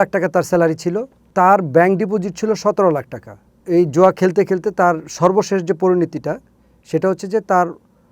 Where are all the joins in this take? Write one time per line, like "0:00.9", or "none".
0:01.3
0:03.6